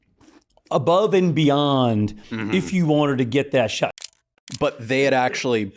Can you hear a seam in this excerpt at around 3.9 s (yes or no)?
yes